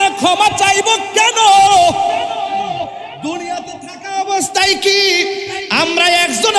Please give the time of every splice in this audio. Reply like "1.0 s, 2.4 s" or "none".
none